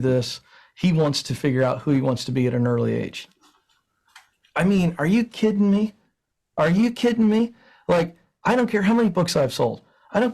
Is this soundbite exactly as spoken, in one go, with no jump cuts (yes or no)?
yes